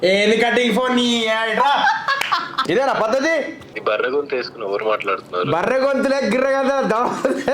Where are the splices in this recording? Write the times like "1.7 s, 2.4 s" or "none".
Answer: 2.5 s, 3.6 s